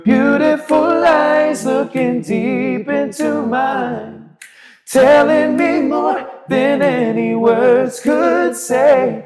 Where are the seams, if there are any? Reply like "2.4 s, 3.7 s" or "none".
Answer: none

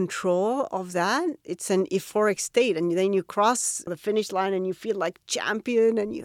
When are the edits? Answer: 1.5 s, 3.9 s

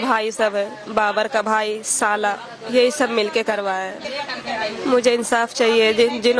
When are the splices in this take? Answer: 3.9 s

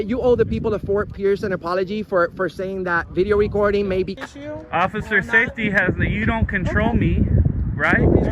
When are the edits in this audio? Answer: 4.1 s

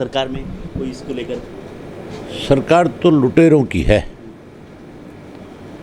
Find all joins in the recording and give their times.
none

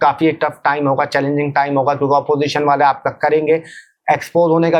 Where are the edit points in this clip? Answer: none

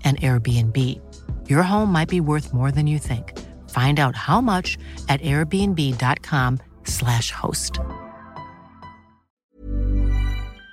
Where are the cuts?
9.4 s

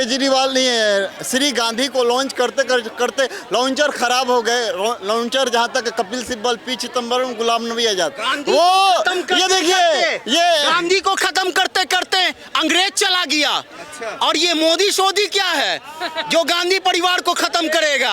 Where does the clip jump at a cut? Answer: none

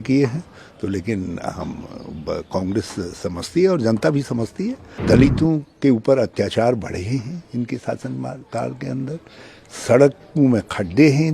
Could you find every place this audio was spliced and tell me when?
4.9 s

